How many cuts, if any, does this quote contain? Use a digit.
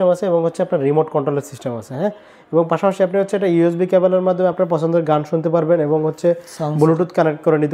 0